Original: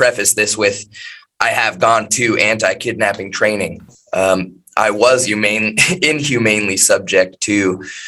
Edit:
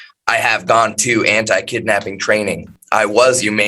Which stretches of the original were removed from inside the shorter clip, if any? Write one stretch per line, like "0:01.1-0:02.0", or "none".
0:03.9-0:04.6